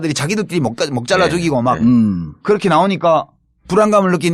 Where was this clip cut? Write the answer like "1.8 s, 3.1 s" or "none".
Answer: 1.6 s